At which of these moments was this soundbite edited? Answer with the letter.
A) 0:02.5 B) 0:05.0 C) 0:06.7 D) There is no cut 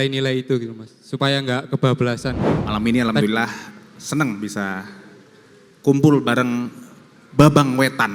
A